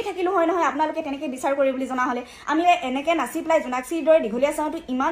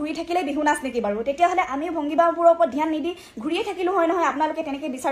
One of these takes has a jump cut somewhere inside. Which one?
first; 1 cut; at 2.6 s

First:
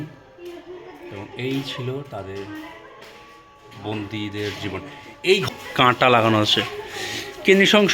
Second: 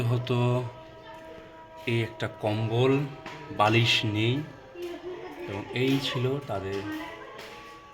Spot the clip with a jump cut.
first; 1 cut; at 5.5 s

